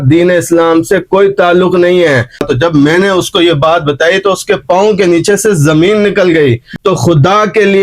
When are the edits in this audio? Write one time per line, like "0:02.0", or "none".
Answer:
0:02.5
0:06.7

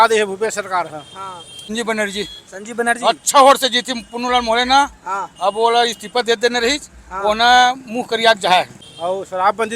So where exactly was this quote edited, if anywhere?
0:01.6
0:08.8

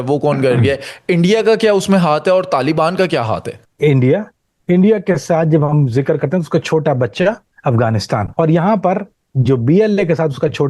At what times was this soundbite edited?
0:03.5
0:08.3

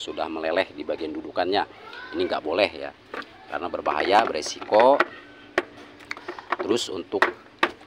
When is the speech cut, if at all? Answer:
none

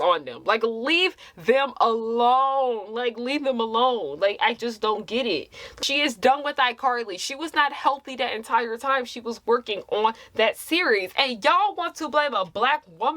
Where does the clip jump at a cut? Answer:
0:05.7

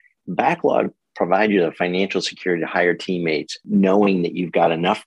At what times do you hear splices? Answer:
0:03.6

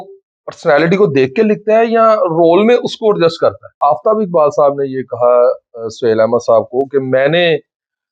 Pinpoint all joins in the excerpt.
0:03.8

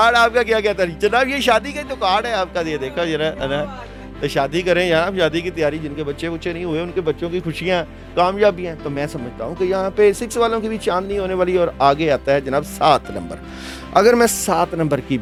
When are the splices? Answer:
none

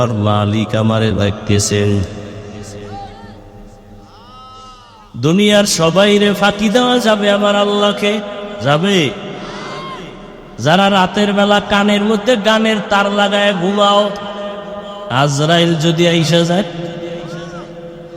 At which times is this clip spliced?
0:08.5
0:15.0

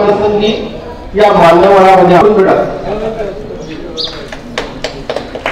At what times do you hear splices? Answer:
none

